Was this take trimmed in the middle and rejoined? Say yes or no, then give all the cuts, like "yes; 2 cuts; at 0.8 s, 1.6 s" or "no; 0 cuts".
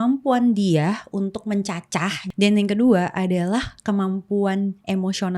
yes; 1 cut; at 2.2 s